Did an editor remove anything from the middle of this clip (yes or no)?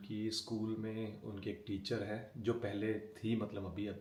no